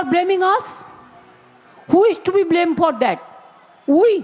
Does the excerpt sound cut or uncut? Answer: uncut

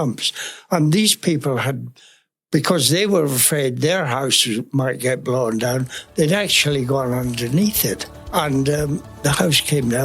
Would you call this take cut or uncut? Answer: cut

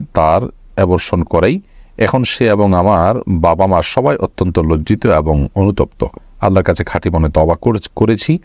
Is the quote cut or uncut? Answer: uncut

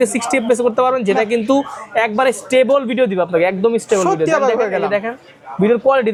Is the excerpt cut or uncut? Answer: uncut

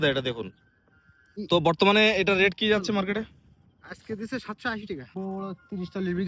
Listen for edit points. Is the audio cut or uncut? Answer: cut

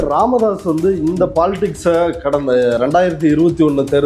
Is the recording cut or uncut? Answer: uncut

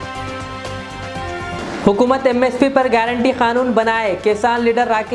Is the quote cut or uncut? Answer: uncut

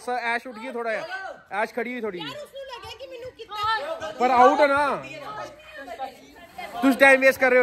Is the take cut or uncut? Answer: uncut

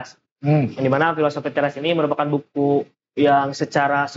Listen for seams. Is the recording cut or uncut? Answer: uncut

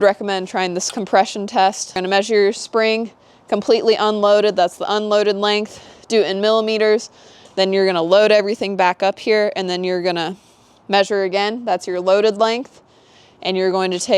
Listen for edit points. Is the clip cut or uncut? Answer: cut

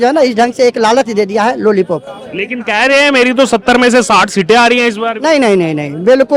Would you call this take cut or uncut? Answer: uncut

